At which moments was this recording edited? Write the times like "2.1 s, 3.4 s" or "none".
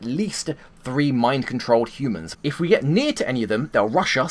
2.3 s